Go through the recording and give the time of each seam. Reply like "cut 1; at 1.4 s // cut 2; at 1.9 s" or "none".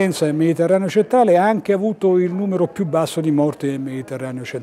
none